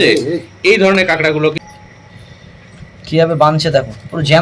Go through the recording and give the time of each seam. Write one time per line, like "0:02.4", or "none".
0:01.6